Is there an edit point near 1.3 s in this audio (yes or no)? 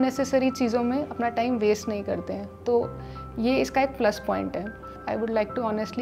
no